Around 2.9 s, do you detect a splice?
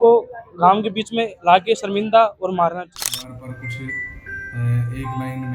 yes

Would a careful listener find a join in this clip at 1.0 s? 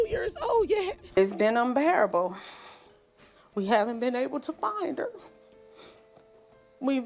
yes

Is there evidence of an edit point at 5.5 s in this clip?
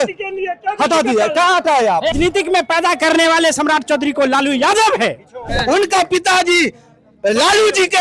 yes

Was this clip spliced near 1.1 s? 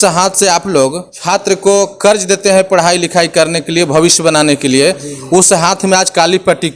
yes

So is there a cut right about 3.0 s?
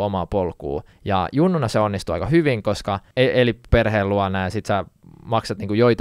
yes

